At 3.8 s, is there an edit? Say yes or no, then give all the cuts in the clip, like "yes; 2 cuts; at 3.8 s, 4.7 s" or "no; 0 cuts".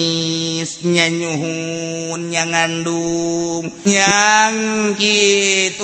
yes; 1 cut; at 3.8 s